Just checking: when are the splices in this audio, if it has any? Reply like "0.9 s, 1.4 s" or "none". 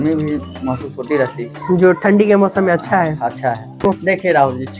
3.9 s

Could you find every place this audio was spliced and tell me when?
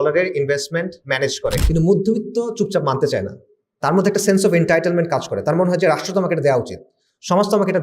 1.6 s

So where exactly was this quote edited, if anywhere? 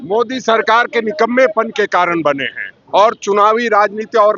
none

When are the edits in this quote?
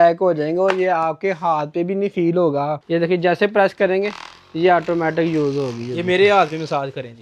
2.8 s

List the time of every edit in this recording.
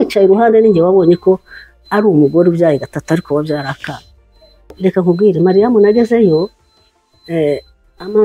4.8 s

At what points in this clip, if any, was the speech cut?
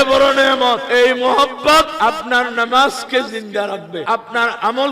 0.8 s, 1.9 s, 4.0 s

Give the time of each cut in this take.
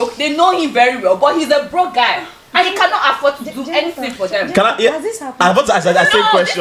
none

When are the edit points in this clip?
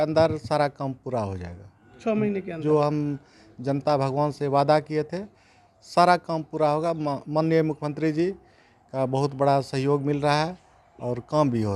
none

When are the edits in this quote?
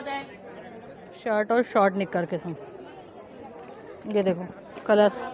1.3 s

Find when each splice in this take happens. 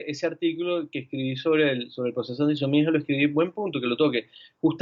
none

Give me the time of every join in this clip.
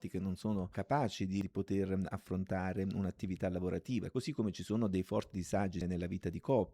4.1 s, 5.8 s

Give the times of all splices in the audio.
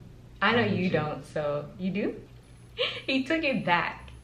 2.2 s

